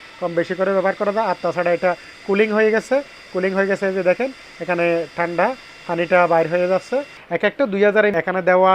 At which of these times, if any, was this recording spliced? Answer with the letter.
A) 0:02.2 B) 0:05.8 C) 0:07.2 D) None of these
C